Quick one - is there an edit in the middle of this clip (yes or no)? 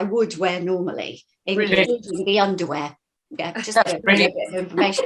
no